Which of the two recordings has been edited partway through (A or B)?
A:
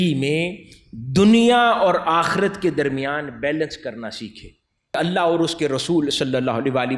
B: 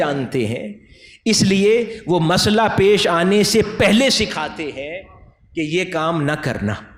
A